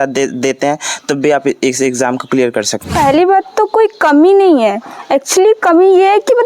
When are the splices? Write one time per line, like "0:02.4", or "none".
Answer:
0:02.9